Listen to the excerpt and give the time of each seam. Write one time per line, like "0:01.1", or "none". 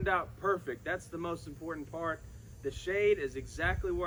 none